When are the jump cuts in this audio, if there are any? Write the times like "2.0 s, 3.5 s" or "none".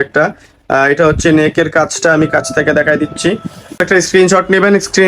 3.8 s